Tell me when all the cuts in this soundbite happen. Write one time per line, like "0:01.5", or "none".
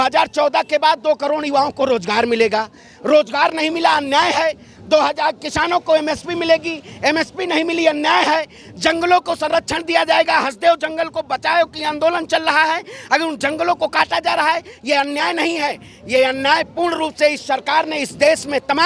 none